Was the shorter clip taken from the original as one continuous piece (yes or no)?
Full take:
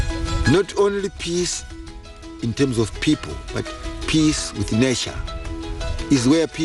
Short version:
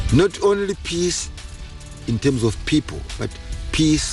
yes